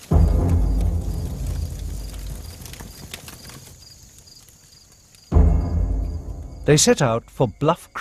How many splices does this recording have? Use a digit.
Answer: 1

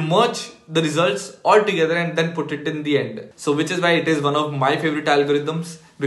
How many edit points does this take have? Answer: 1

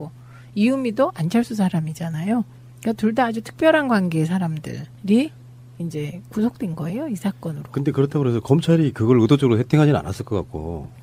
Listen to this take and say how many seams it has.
1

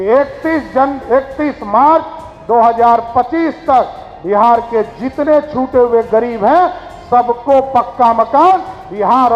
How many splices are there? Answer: 0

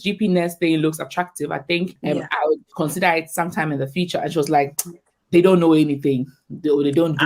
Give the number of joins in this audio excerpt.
0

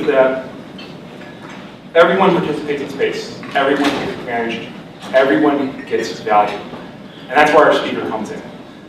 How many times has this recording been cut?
1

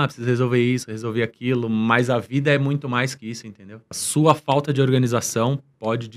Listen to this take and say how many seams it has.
1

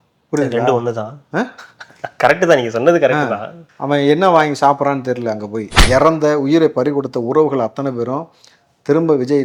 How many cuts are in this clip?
1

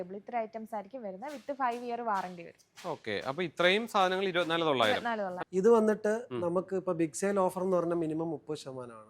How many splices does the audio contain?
1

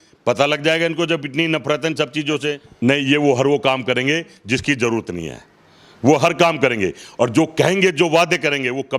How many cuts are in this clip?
1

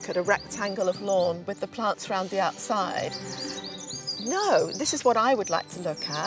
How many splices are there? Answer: 0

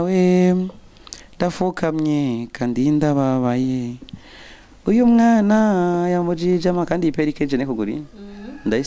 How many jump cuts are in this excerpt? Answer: 0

